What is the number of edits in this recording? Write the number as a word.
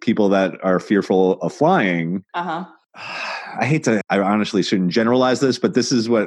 one